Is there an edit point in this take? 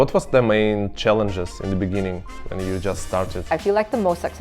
yes; 1 cut; at 3.5 s

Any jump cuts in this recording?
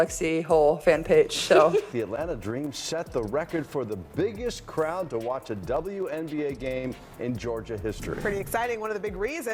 yes; 1 cut; at 1.9 s

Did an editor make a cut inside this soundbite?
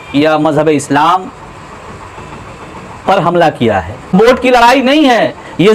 yes; 1 cut; at 4.1 s

